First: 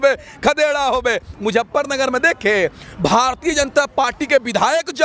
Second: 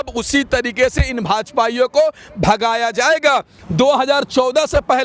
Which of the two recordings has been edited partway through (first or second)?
second